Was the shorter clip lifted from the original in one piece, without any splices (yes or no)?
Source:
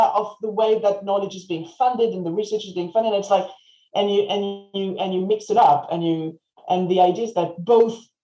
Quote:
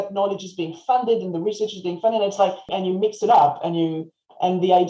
no